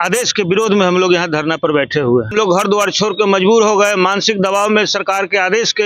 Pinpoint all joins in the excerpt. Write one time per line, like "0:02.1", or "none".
0:02.3